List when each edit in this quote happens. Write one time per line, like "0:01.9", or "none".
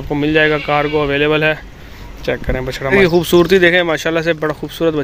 0:02.9

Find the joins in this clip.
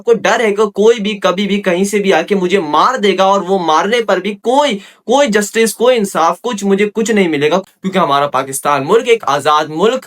0:07.6

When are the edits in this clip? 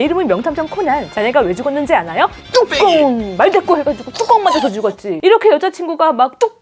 none

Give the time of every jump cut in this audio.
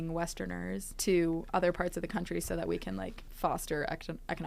0:00.9
0:03.2

